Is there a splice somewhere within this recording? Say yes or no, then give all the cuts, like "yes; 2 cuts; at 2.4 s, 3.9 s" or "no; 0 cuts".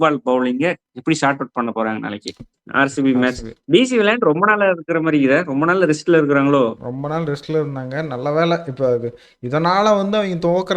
yes; 1 cut; at 2.6 s